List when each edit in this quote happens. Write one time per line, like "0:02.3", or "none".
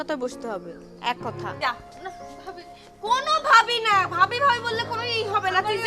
0:01.6